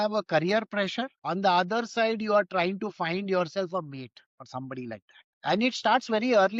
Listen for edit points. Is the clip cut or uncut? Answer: uncut